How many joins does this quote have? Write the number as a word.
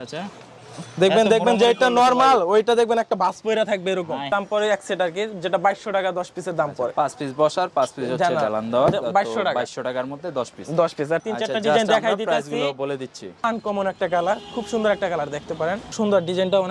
four